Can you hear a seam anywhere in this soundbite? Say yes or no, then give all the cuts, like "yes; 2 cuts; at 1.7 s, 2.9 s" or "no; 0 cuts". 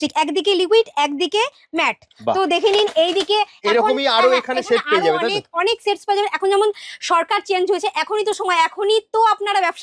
no; 0 cuts